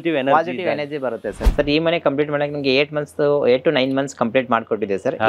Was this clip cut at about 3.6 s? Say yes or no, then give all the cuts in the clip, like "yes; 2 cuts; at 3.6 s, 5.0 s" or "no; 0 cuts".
no; 1 cut; at 1.4 s